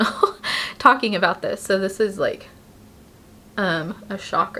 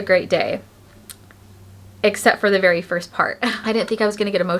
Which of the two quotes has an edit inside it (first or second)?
second